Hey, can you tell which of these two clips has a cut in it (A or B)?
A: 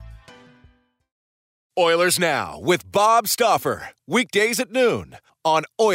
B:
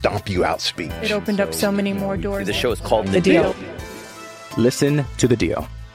A